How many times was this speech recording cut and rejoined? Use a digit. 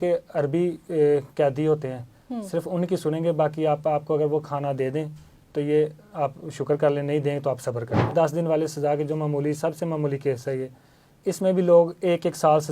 1